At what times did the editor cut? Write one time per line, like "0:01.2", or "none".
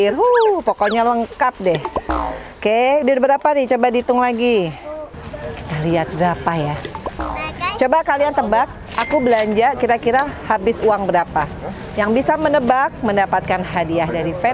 0:05.1